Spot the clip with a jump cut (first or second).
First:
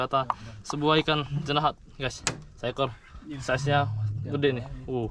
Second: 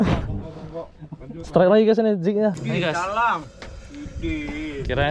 second